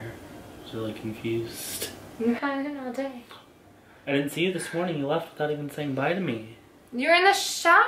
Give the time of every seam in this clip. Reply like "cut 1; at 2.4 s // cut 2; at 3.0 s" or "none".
none